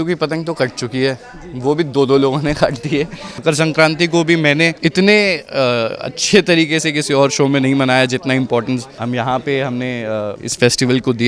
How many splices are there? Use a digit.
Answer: 4